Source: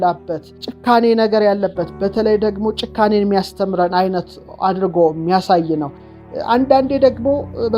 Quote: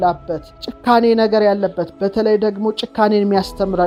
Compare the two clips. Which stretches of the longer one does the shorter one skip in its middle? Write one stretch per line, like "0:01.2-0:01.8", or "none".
none